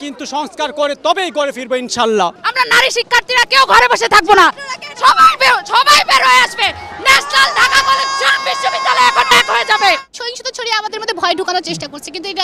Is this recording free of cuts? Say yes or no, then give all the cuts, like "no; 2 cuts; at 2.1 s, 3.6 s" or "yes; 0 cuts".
no; 2 cuts; at 2.4 s, 10.1 s